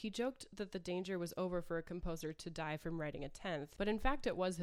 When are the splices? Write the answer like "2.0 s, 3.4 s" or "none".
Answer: 3.7 s